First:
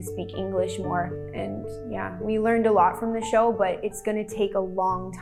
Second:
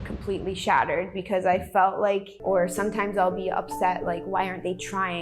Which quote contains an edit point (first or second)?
second